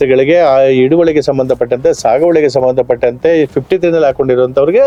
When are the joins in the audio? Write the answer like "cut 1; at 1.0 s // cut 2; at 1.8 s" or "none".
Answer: none